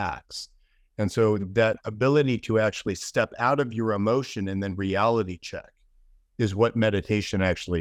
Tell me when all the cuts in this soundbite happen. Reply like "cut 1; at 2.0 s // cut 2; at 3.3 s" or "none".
none